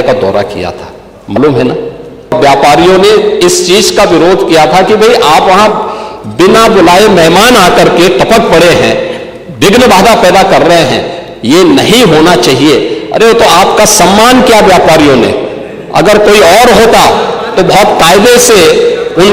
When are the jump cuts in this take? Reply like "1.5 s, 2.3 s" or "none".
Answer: 2.3 s